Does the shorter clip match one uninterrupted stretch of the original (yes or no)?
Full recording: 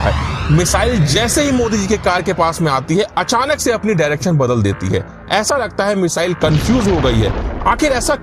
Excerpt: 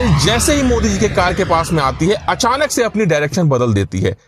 yes